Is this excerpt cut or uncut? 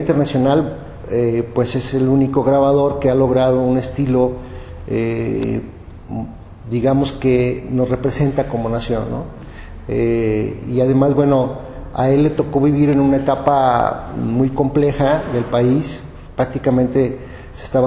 uncut